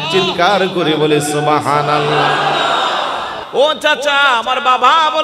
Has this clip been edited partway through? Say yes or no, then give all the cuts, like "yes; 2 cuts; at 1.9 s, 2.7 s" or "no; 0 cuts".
yes; 1 cut; at 3.4 s